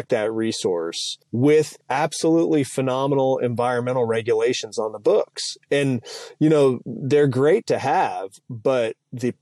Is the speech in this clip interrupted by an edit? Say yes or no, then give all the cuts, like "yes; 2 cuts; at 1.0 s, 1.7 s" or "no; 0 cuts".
yes; 2 cuts; at 1.2 s, 1.8 s